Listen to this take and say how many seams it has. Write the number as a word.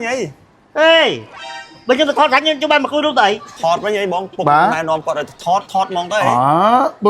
one